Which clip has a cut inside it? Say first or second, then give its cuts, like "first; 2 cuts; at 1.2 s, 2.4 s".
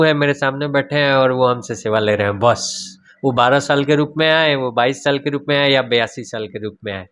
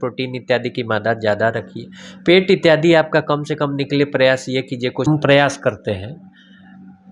second; 1 cut; at 5.1 s